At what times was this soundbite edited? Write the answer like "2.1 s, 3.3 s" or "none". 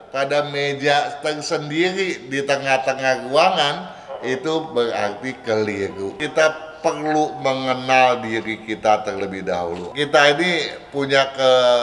6.2 s, 9.8 s